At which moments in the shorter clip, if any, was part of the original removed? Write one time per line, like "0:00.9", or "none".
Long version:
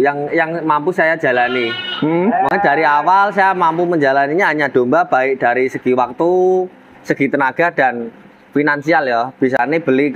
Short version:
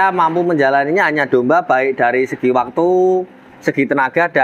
none